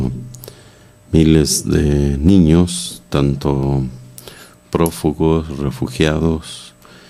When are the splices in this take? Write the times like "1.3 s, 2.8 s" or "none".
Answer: 4.9 s